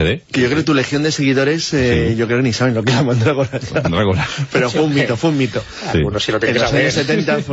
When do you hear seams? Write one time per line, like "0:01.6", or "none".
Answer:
0:02.0